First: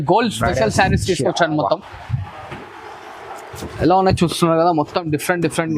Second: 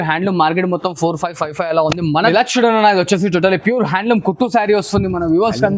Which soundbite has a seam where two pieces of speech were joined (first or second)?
second